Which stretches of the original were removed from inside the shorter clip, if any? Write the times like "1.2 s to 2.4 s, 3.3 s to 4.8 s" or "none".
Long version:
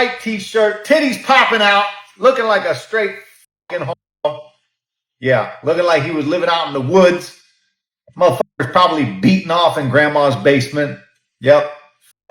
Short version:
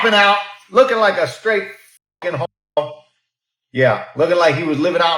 none